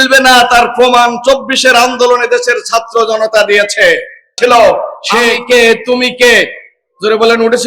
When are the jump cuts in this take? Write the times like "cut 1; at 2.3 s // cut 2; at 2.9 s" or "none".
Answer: cut 1; at 4.3 s